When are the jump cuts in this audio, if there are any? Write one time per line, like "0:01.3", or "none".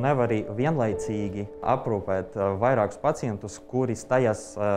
0:01.6

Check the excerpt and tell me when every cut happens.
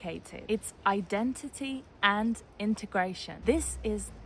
0:03.3

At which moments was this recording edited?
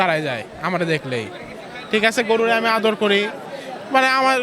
none

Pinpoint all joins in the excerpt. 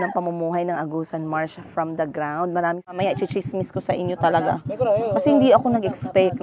0:02.9

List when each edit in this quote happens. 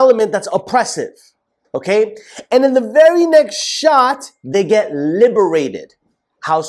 none

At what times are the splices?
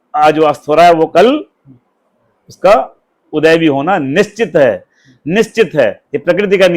none

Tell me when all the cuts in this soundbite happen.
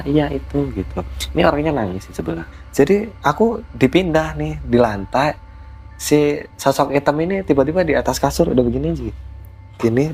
0:02.6

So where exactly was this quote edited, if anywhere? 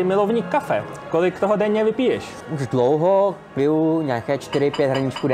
0:02.5

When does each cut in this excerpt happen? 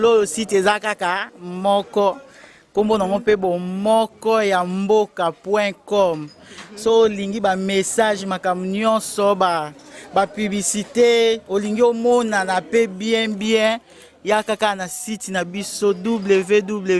none

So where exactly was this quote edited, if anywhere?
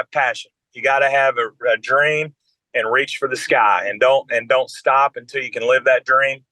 none

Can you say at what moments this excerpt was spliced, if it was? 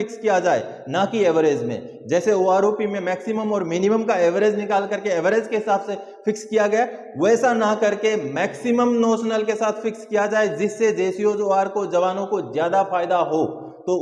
none

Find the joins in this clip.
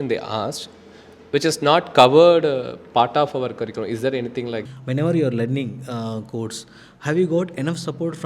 0:04.7

